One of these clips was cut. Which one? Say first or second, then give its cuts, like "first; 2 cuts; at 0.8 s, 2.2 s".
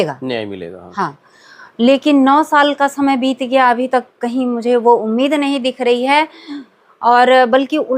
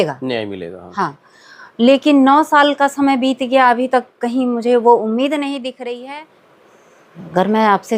second; 1 cut; at 6.0 s